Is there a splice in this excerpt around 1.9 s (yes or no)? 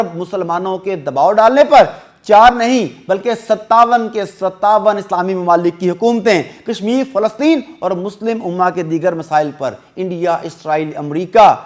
no